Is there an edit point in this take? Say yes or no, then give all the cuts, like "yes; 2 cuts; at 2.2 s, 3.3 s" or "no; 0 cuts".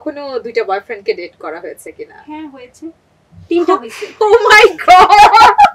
no; 0 cuts